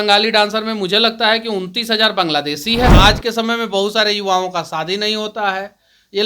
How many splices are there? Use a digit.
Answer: 1